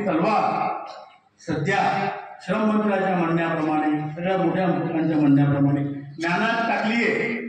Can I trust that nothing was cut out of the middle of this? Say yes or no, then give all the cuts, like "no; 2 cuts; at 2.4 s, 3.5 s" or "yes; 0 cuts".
yes; 0 cuts